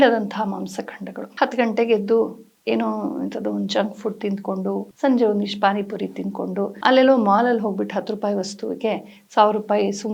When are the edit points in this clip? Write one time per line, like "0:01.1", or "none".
0:01.3
0:04.9
0:06.7